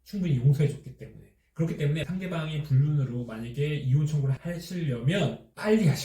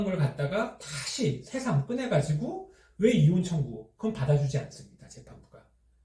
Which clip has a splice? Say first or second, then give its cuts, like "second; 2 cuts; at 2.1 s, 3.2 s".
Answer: first; 1 cut; at 2.1 s